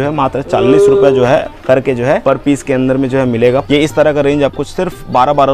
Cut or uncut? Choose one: cut